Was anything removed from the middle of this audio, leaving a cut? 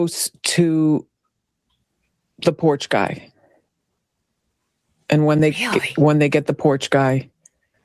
no; 0 cuts

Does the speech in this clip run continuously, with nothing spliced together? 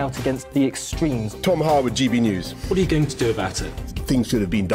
yes; 0 cuts

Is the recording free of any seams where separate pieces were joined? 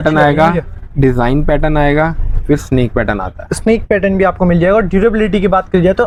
yes; 0 cuts

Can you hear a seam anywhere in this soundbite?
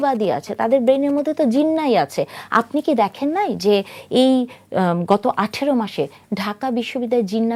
no; 0 cuts

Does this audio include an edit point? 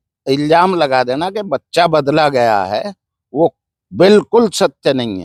no; 0 cuts

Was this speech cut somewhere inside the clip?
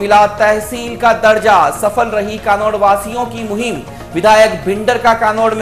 no; 0 cuts

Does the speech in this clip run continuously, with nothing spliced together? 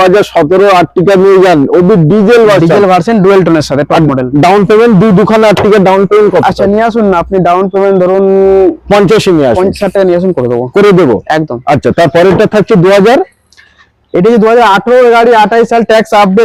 yes; 0 cuts

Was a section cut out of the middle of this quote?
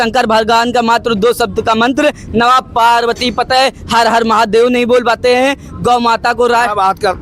no; 0 cuts

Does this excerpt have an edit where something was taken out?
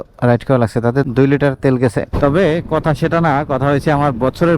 yes; 1 cut; at 2.1 s

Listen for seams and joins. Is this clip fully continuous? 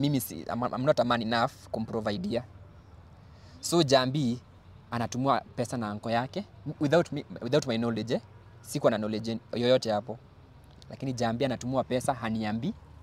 yes; 0 cuts

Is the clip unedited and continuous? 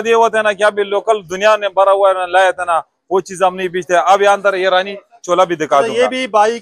yes; 0 cuts

